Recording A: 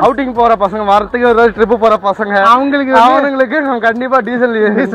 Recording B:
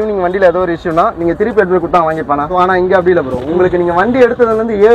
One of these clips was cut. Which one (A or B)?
B